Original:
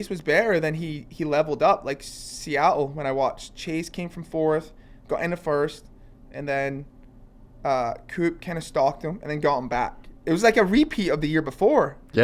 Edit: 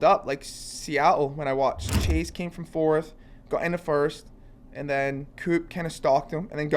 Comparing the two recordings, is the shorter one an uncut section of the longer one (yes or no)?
no